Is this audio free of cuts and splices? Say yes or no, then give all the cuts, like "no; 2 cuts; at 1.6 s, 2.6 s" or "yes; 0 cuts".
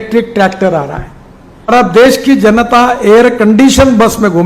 no; 1 cut; at 1.7 s